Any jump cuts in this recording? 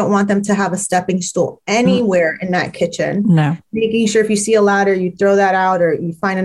no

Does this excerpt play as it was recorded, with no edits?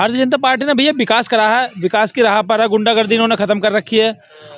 yes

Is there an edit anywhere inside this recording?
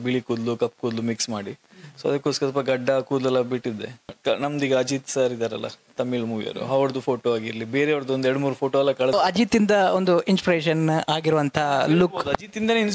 yes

